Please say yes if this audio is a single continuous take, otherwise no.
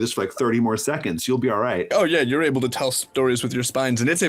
no